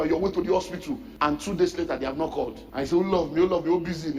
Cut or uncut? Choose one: cut